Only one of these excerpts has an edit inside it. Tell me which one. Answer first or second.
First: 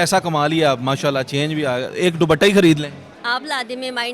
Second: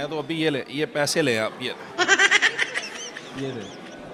first